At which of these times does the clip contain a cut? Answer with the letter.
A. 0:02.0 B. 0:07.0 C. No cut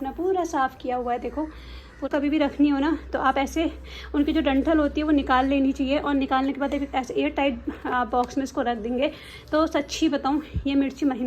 A